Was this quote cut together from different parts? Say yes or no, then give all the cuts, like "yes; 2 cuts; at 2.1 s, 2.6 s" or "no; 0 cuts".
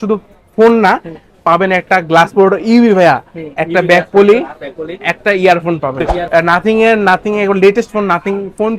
yes; 1 cut; at 6.2 s